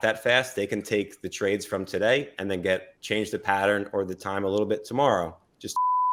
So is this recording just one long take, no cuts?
yes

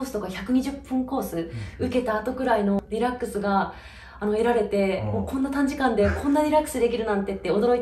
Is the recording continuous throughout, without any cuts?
no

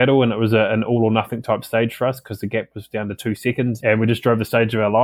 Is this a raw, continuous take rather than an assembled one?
no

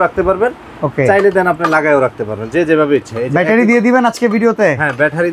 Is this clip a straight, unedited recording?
yes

